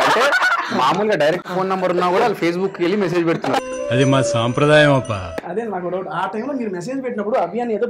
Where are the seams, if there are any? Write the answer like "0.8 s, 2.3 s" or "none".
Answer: 3.7 s

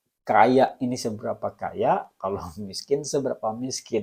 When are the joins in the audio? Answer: none

